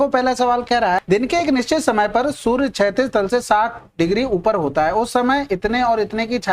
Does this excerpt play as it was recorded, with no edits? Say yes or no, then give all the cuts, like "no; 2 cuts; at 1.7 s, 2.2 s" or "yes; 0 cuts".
no; 1 cut; at 1.0 s